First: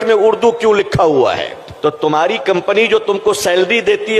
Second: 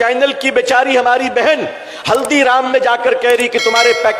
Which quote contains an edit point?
first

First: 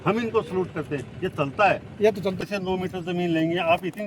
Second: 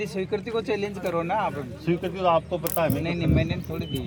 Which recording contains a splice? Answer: first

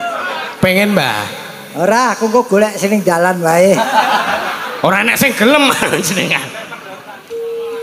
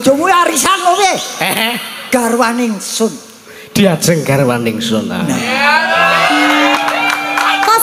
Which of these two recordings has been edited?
second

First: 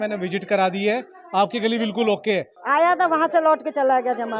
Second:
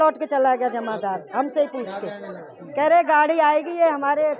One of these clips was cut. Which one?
first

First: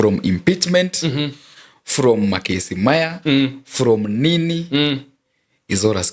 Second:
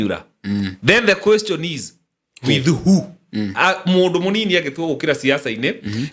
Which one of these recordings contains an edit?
second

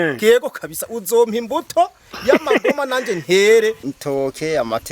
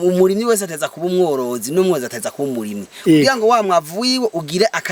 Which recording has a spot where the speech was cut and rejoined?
first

